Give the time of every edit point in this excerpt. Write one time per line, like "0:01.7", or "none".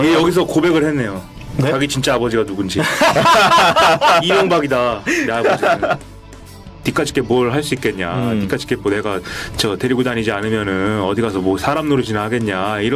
0:06.3